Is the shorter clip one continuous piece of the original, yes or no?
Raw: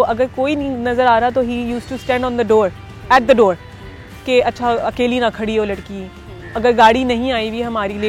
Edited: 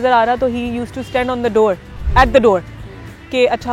yes